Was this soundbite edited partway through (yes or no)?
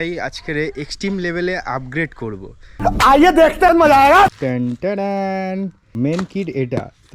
yes